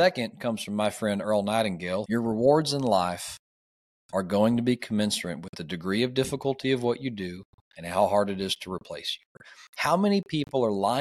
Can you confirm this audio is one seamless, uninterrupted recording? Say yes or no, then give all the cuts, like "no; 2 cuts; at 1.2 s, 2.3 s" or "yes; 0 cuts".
no; 2 cuts; at 2.0 s, 9.4 s